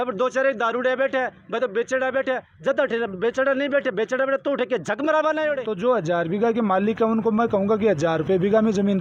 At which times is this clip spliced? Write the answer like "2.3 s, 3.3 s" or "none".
5.7 s